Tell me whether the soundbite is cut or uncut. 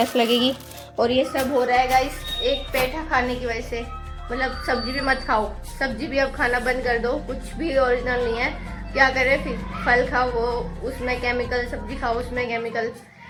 uncut